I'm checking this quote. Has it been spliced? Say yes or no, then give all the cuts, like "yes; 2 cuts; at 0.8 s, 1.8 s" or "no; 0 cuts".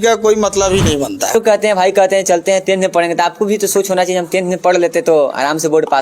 yes; 1 cut; at 1.3 s